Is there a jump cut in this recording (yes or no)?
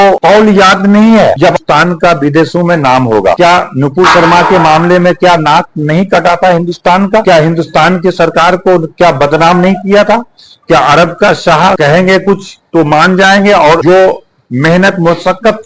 yes